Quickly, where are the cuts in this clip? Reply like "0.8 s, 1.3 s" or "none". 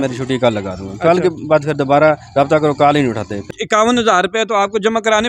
3.5 s